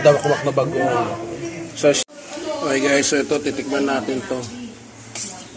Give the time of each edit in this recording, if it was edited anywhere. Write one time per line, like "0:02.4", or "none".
0:02.0